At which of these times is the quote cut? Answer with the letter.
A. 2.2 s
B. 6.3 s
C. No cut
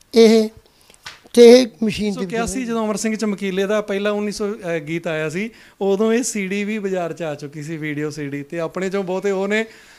A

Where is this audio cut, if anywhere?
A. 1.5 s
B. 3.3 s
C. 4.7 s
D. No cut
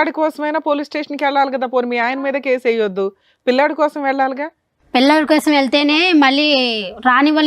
D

